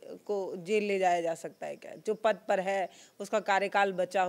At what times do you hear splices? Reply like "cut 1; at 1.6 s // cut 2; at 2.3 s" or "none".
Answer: none